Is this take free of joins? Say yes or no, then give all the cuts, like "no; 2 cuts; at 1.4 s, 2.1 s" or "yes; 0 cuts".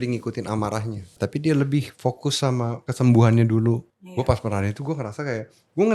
no; 3 cuts; at 1.1 s, 2.8 s, 4.0 s